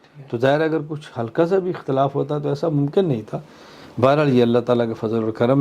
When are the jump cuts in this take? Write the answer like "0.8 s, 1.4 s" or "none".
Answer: none